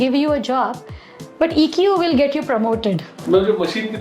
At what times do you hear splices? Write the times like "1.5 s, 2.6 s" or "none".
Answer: 3.1 s